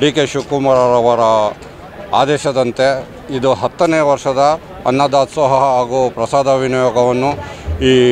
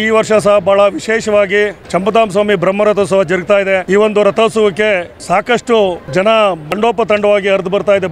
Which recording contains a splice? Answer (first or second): second